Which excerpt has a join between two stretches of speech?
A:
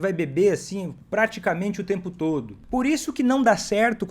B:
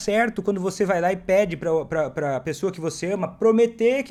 A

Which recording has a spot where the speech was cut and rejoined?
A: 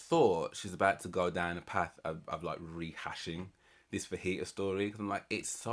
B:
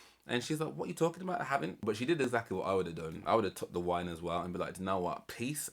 B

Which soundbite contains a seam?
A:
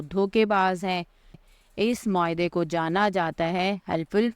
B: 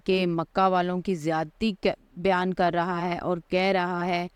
A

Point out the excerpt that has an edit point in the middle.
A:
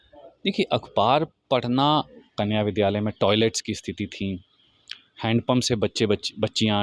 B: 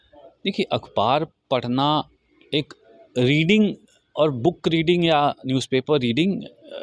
A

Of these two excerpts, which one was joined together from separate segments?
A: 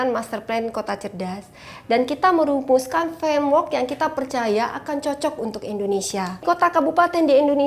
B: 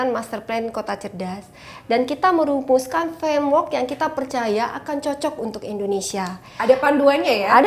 A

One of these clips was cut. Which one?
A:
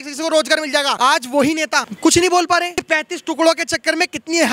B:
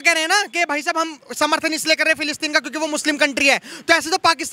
A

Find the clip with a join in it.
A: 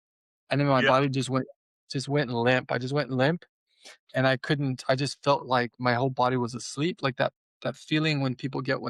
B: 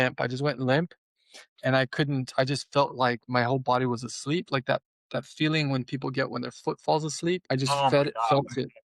B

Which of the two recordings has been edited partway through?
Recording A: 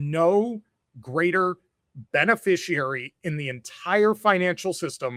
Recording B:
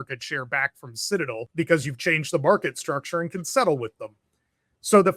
B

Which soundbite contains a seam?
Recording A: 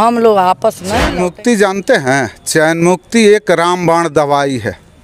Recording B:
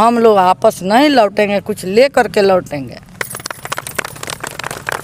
A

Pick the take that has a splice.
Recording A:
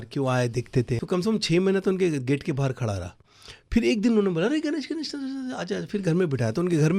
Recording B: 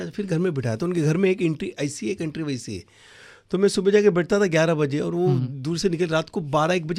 A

